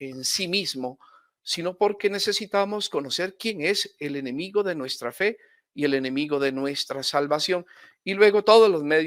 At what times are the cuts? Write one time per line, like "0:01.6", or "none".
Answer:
none

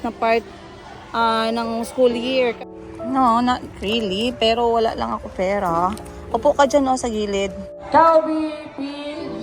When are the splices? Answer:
0:02.6
0:07.7

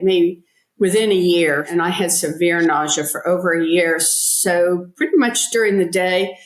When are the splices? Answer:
0:01.7

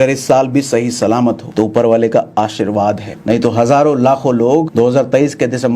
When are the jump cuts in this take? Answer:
0:01.4
0:03.1
0:04.7

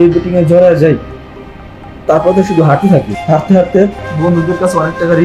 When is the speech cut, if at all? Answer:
0:03.2
0:04.0

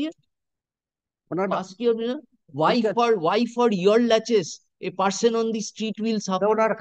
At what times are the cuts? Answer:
none

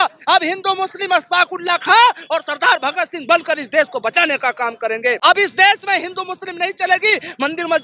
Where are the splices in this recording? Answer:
0:05.2

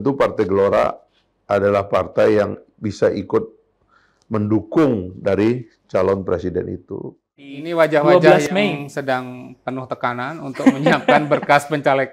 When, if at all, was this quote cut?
0:07.6

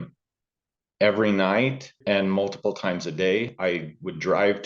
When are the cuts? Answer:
0:01.9

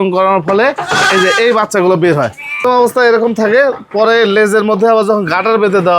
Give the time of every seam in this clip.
0:02.6

